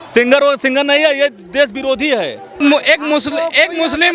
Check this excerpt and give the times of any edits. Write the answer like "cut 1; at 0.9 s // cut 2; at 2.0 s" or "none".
cut 1; at 2.5 s